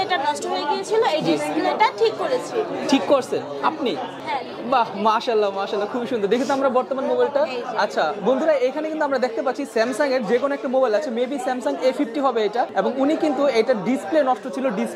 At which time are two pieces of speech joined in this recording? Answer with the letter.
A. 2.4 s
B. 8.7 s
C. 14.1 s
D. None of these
D